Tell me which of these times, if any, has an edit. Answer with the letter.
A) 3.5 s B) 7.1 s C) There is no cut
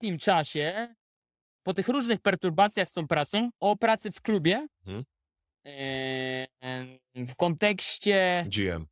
A